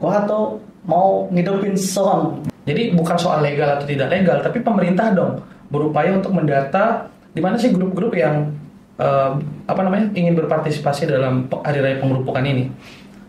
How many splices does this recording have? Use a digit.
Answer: 1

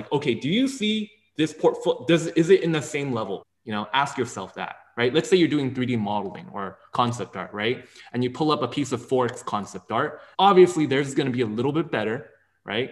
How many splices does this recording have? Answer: 2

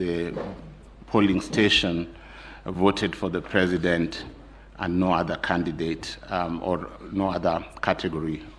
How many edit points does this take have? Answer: 0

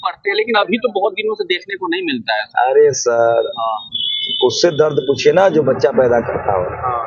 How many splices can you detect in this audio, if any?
0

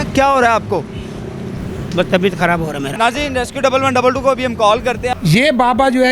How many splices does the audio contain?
2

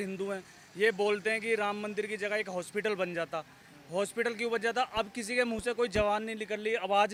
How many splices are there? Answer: 0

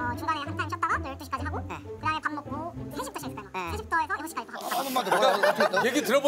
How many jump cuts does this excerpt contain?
1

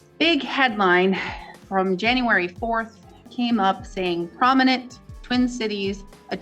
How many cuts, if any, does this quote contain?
1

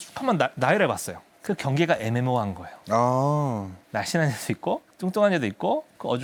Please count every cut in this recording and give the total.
0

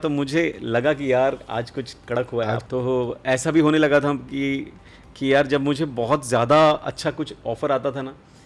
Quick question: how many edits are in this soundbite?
1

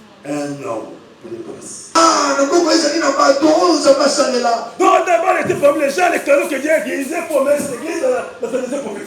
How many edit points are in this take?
1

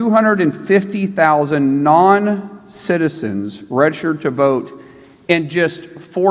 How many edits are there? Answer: 0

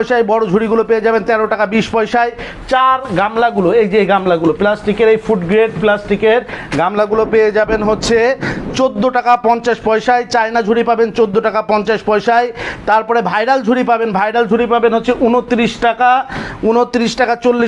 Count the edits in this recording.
0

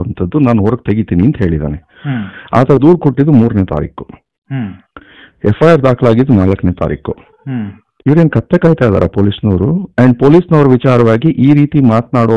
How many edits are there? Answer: 0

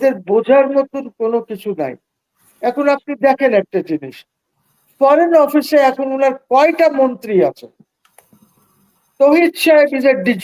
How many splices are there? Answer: 0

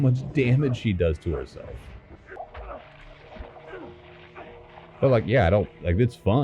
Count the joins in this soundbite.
1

